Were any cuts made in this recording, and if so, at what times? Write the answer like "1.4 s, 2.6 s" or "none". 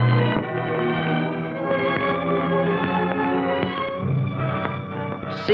2.8 s